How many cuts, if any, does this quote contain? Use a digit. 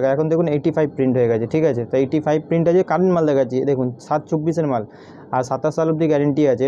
0